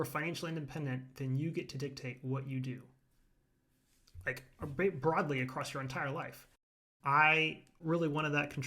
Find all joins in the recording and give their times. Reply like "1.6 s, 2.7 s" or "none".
6.7 s, 7.7 s